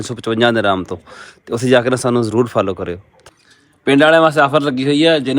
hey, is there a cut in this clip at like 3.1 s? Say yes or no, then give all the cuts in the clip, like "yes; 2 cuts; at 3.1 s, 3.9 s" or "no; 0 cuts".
yes; 1 cut; at 3.1 s